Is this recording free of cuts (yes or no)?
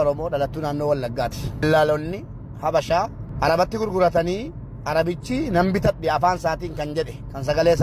no